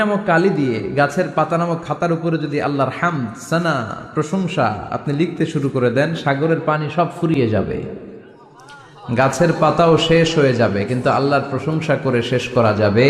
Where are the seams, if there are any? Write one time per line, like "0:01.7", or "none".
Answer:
none